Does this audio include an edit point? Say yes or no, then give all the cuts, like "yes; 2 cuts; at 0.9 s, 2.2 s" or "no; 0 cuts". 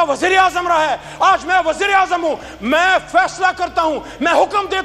no; 0 cuts